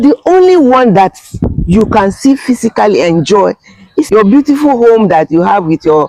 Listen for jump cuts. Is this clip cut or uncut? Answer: cut